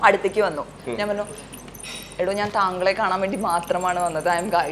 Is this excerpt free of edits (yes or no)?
yes